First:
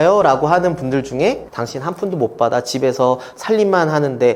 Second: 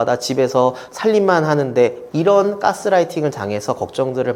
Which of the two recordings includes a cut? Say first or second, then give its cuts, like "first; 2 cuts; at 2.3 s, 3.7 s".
first; 1 cut; at 1.5 s